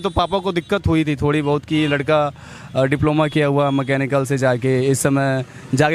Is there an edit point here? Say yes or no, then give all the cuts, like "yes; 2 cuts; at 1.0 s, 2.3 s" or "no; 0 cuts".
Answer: no; 0 cuts